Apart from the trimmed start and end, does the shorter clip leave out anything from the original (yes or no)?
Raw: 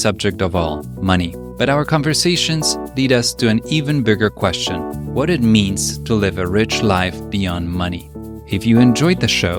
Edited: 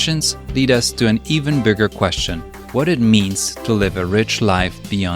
no